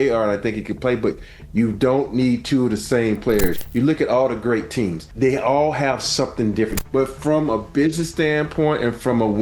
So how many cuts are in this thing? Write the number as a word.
three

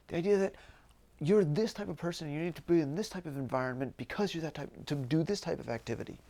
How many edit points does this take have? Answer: zero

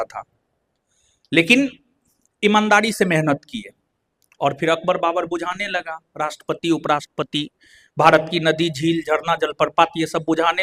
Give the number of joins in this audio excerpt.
zero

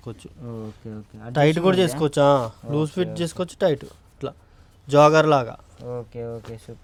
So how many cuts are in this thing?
zero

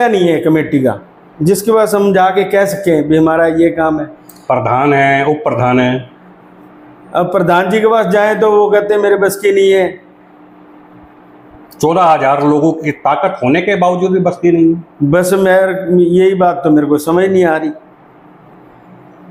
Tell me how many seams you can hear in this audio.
zero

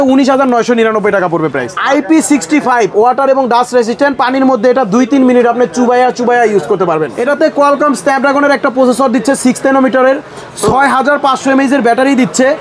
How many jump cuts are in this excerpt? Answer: two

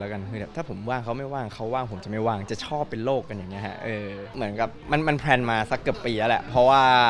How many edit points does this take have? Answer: one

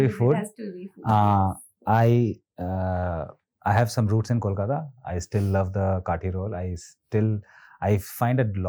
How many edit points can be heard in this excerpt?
zero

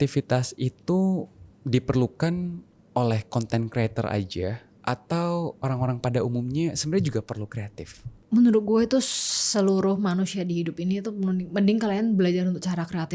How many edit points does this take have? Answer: zero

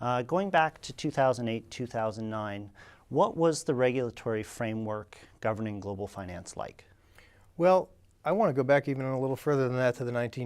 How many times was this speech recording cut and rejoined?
one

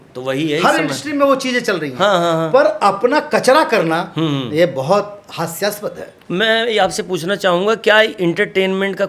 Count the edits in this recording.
one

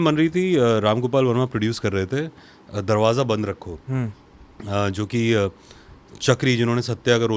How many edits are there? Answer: zero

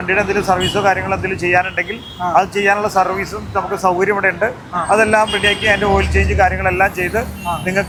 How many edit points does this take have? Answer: zero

